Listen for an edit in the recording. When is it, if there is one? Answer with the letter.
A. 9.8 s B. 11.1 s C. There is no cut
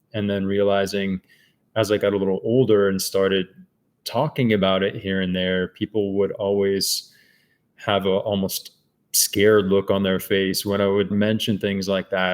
B